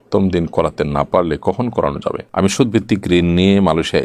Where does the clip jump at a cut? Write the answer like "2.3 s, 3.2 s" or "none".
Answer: 2.3 s

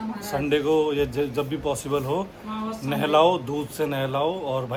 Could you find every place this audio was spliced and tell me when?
none

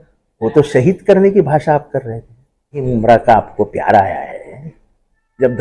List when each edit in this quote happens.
2.9 s

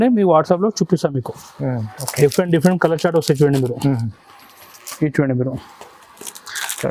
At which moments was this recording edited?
2.0 s

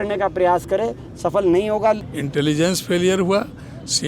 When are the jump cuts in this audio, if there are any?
2.1 s

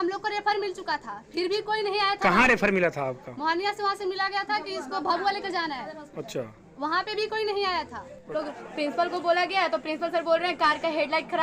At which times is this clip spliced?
8.3 s

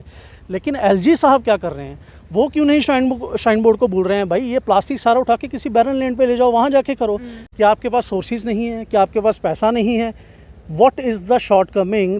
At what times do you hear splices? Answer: none

